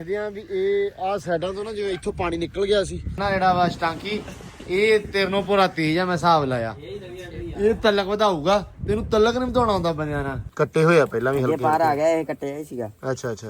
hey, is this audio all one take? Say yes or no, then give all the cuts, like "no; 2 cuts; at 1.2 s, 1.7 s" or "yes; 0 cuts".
no; 2 cuts; at 3.2 s, 10.4 s